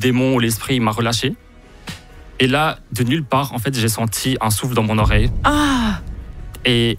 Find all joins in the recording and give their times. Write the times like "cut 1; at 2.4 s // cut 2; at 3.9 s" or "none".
none